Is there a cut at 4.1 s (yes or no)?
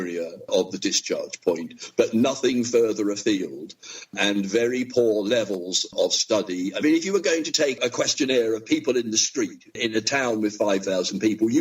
no